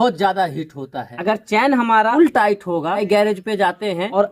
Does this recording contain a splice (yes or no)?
yes